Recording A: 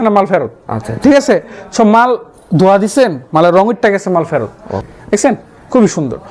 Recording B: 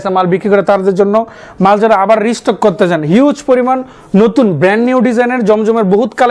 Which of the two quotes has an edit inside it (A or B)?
A